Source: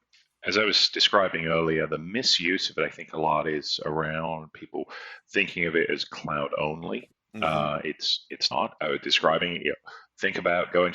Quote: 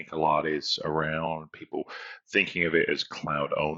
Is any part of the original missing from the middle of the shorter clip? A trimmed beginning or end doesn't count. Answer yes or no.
no